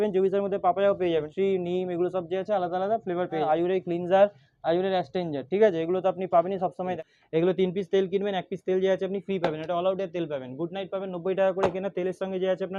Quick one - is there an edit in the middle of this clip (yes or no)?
yes